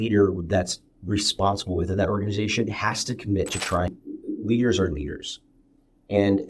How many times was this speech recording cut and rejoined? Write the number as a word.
one